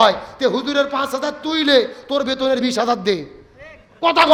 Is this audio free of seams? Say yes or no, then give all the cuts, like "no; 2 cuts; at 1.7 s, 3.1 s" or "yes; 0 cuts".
yes; 0 cuts